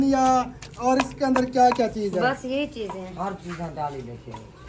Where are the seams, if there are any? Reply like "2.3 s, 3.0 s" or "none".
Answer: none